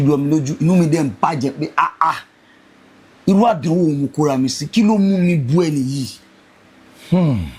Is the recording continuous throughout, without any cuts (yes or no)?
yes